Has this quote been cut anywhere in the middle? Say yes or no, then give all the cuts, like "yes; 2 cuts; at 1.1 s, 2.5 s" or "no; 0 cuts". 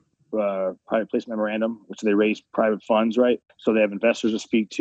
yes; 2 cuts; at 2.4 s, 3.5 s